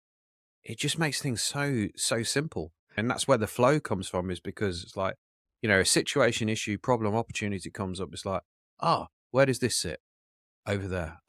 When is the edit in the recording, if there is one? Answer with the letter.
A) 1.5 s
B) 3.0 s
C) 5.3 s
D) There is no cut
B